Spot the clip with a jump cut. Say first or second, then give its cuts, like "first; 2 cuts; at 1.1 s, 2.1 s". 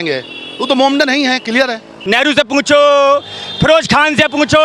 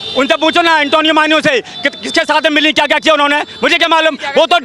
first; 1 cut; at 2.0 s